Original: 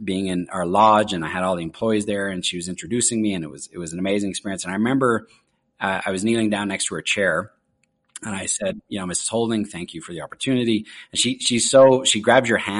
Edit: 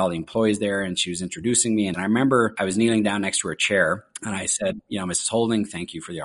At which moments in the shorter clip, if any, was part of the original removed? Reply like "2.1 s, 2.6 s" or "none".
2.0 s, 2.6 s, 4.1 s